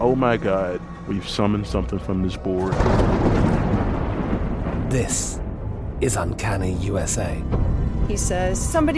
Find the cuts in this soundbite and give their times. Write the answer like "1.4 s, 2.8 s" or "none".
none